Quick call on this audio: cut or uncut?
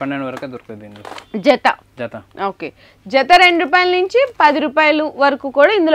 uncut